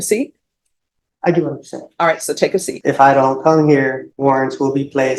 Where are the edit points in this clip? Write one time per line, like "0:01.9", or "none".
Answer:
0:02.7
0:04.1